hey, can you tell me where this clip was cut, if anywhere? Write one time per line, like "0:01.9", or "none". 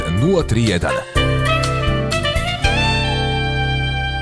none